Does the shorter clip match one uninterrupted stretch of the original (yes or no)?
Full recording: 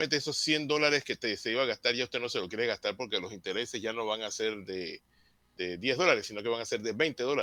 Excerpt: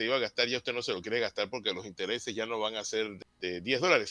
no